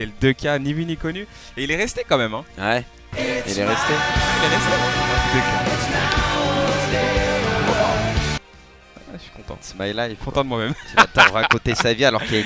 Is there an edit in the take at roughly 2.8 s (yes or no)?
no